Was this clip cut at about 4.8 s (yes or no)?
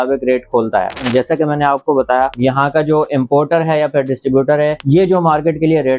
yes